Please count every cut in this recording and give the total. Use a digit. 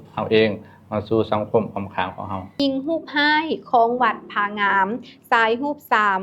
1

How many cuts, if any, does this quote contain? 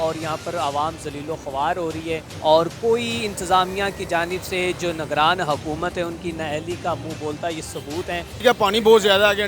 2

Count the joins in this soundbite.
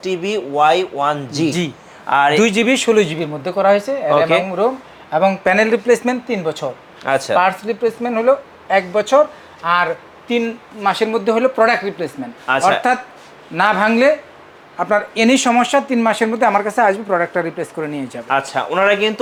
0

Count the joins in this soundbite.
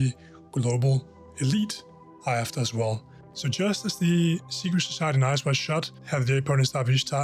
2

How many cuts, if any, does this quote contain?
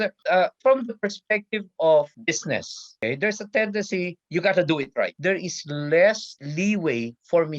2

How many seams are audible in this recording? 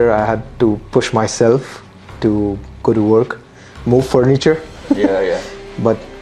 0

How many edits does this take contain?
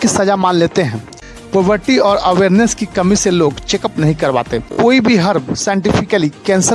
2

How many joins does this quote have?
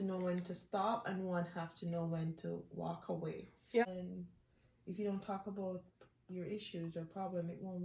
1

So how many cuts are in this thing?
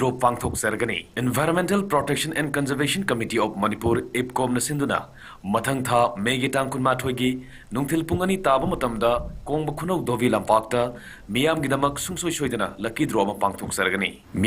1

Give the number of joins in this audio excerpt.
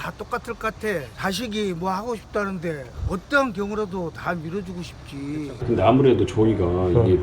2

